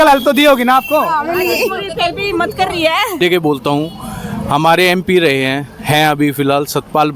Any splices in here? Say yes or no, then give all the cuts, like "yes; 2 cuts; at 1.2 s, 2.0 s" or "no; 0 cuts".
yes; 1 cut; at 3.2 s